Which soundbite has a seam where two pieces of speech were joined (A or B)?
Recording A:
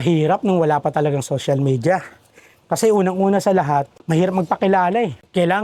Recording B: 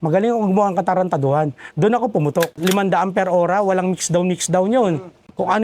B